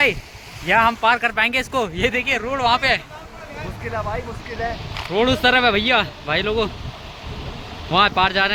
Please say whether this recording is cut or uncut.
uncut